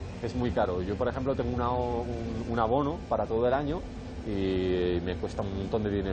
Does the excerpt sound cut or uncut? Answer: uncut